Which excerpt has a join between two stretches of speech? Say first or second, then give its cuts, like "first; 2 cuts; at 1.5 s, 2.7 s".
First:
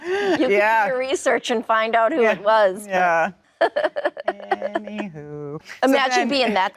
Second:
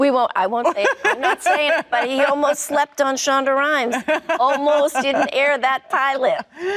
first; 2 cuts; at 3.4 s, 5.7 s